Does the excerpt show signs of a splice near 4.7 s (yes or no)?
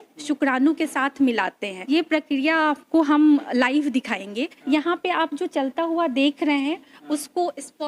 yes